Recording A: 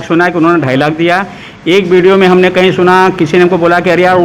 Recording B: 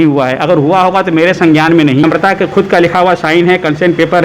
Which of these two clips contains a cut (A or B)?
B